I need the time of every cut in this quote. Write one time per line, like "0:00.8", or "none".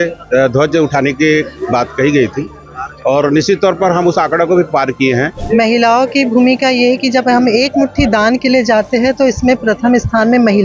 0:05.4